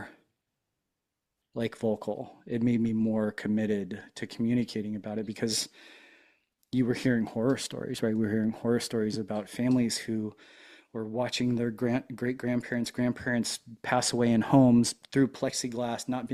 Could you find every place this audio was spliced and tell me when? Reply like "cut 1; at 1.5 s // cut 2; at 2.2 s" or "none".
none